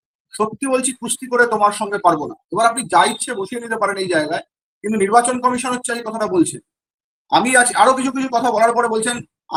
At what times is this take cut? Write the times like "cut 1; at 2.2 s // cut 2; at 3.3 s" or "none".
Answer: none